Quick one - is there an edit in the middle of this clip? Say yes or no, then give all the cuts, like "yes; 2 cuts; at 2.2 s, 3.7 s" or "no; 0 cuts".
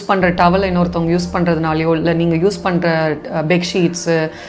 no; 0 cuts